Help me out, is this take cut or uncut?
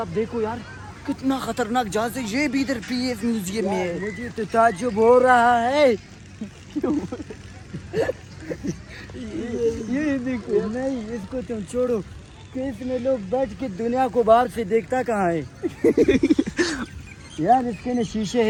uncut